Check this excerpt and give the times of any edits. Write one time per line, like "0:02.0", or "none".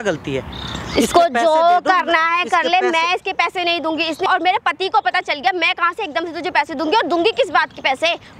0:04.3